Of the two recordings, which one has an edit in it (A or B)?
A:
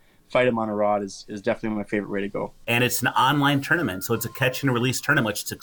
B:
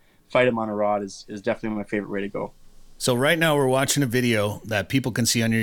A